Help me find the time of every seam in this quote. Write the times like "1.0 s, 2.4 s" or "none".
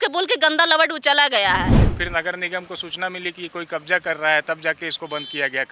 1.9 s